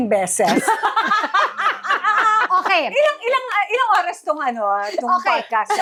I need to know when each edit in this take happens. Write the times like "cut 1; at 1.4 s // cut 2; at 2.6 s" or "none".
none